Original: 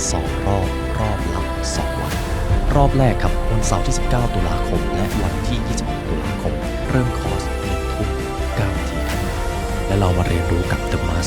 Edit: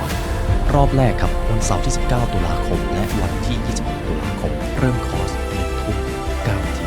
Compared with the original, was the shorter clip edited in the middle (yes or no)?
yes